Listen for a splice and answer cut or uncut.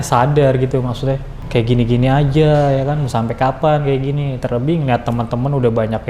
cut